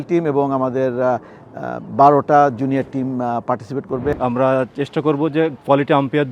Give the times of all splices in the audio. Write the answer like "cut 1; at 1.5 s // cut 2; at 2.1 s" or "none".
cut 1; at 4.1 s